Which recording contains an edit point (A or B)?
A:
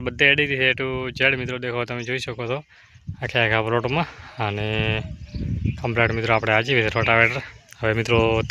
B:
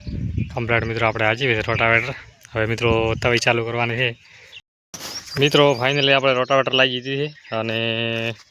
B